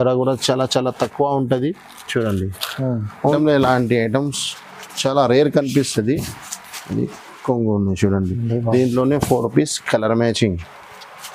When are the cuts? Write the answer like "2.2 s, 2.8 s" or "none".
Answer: 3.3 s